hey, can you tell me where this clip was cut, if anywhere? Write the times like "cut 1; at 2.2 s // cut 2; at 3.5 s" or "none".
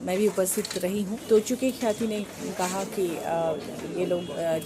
cut 1; at 1.2 s